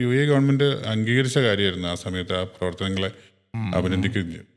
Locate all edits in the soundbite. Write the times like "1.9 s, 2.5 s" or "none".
none